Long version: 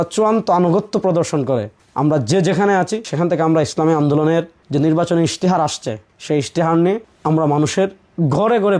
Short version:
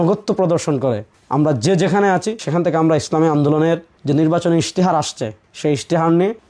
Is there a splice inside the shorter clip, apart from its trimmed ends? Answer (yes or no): no